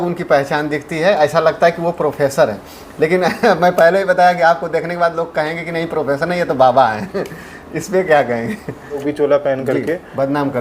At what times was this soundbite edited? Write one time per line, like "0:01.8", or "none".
0:09.1